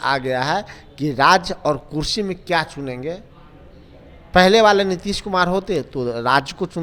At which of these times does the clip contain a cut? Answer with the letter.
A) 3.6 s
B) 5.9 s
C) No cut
C